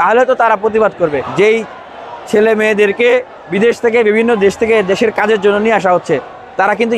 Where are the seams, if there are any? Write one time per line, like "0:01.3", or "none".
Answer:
0:01.2
0:03.4